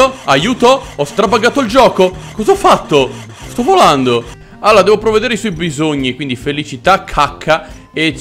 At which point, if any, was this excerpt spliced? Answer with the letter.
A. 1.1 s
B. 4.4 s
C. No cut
B